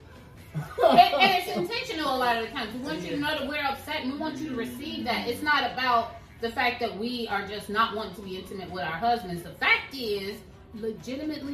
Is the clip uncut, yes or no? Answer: no